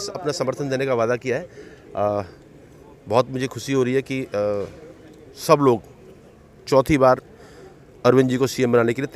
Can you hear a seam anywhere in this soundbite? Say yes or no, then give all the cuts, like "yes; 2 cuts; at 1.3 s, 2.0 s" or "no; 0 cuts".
no; 0 cuts